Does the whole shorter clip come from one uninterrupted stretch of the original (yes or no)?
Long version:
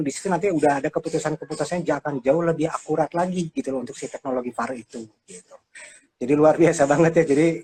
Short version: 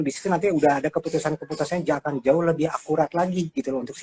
yes